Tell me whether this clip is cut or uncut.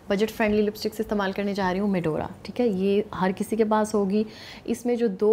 uncut